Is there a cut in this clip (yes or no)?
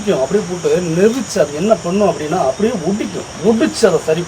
yes